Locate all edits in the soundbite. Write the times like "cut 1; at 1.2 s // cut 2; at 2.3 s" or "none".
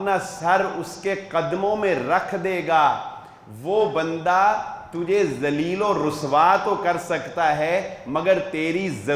none